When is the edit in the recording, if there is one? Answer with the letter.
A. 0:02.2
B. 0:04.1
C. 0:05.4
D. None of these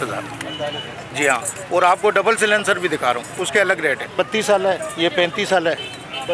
B